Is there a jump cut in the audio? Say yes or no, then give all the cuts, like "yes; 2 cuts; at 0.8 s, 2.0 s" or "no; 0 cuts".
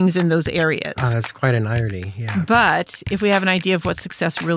no; 0 cuts